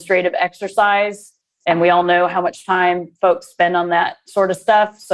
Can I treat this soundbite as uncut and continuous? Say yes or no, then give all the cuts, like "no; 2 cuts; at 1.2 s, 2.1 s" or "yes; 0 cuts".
yes; 0 cuts